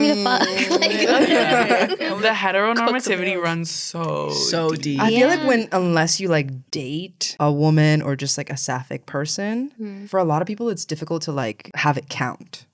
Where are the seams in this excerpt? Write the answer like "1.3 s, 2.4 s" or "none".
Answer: none